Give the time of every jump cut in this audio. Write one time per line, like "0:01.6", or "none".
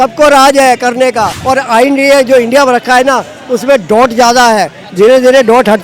0:01.4